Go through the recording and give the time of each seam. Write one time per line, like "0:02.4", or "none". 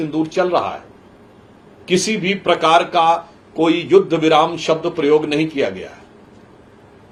none

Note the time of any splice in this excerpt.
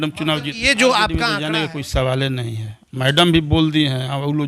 0:01.3

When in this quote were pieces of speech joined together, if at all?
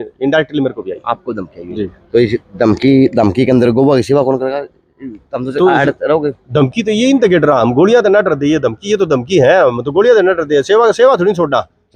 none

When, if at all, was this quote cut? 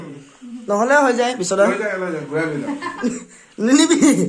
none

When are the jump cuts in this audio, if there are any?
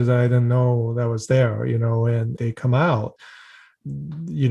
0:03.2

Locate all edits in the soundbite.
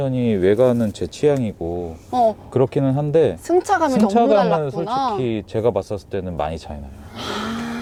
none

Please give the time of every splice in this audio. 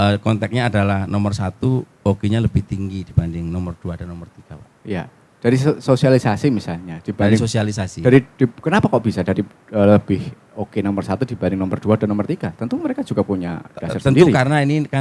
none

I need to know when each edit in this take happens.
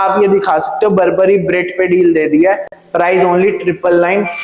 none

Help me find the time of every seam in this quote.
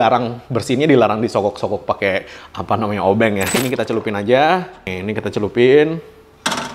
0:03.6

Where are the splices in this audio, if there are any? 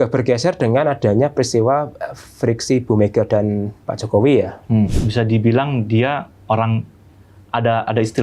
0:04.9

